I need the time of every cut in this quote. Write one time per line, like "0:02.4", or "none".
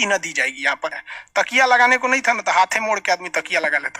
0:01.0

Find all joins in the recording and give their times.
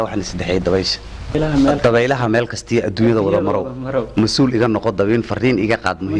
0:01.4

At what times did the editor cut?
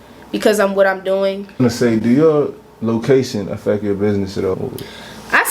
0:01.6
0:04.5

